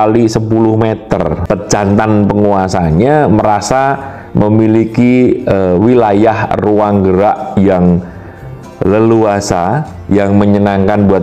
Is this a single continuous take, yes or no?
no